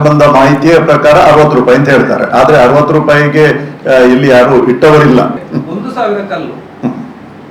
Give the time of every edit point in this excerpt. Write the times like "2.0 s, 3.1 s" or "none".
5.4 s

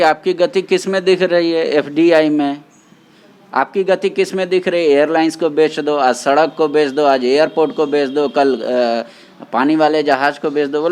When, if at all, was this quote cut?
none

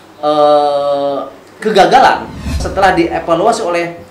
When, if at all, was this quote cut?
2.7 s

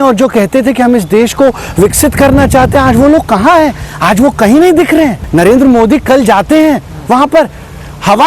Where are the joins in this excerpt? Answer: 5.2 s

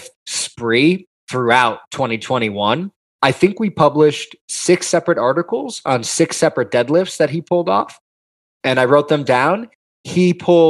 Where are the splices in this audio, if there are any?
3.0 s

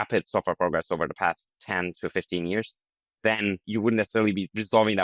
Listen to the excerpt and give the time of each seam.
1.5 s, 3.6 s

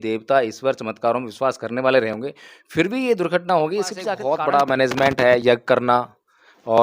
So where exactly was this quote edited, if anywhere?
4.2 s

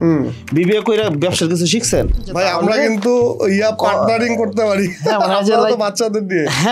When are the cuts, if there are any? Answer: 2.3 s

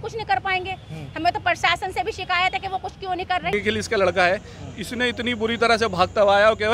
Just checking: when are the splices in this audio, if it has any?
3.5 s

